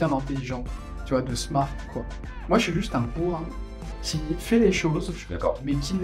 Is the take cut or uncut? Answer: uncut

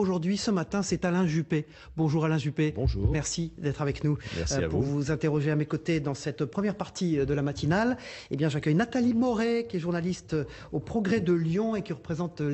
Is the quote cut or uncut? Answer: uncut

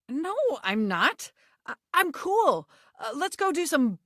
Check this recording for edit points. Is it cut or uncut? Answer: uncut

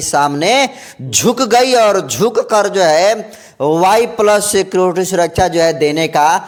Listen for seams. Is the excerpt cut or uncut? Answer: uncut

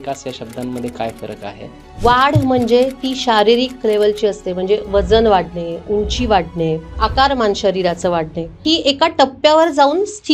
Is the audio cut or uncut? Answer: cut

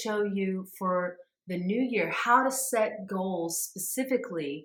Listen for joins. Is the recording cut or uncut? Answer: uncut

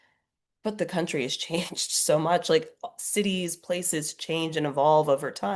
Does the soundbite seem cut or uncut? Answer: uncut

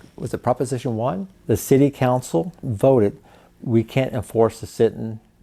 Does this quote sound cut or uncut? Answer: cut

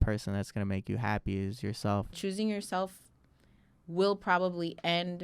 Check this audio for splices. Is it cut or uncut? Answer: cut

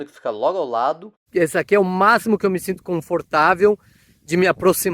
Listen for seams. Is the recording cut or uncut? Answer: cut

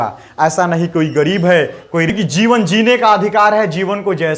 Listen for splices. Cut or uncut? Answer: cut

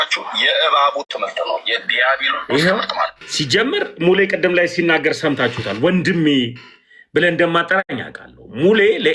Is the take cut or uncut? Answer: cut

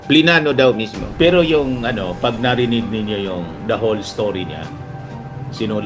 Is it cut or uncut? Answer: cut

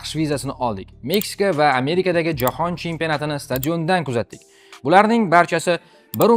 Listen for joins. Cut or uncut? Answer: uncut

